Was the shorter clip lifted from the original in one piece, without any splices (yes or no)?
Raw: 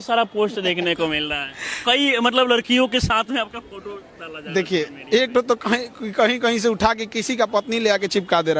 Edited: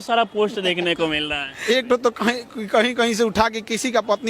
no